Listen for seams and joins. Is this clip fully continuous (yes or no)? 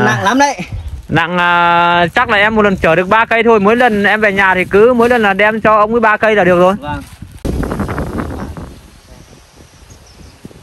no